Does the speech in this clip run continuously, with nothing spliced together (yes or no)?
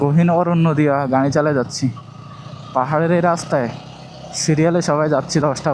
yes